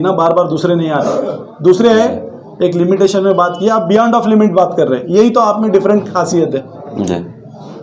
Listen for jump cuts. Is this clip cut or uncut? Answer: uncut